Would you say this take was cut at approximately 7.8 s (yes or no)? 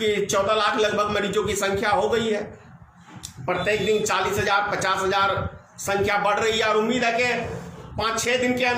yes